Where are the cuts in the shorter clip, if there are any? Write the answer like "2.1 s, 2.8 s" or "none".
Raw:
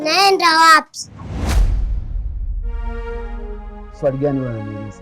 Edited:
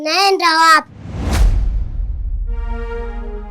1.0 s